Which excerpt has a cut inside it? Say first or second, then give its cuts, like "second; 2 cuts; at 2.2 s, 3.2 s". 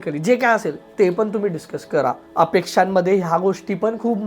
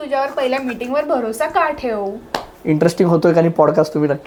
first; 1 cut; at 2.2 s